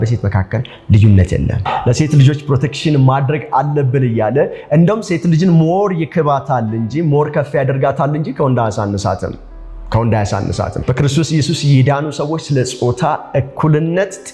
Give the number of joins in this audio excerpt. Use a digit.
2